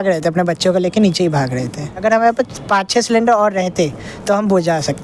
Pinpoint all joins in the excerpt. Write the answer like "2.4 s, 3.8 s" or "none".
2.0 s